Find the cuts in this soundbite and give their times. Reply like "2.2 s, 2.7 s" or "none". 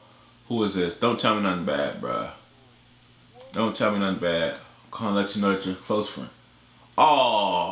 none